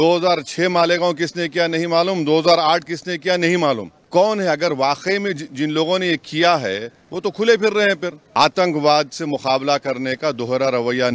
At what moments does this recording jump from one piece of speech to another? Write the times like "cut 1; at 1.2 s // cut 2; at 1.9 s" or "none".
cut 1; at 3.9 s // cut 2; at 8.2 s